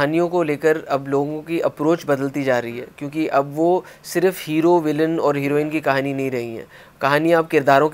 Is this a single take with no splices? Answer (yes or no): yes